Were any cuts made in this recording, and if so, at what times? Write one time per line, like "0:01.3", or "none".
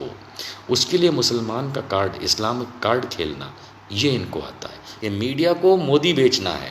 0:04.9